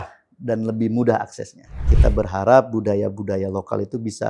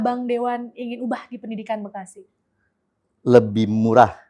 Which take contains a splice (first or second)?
first